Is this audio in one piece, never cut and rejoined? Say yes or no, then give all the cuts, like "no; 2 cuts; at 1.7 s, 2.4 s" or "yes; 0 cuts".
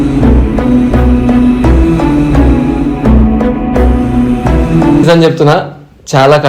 no; 1 cut; at 5.1 s